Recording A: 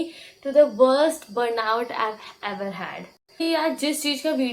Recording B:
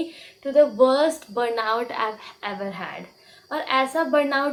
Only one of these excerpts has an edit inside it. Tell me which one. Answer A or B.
A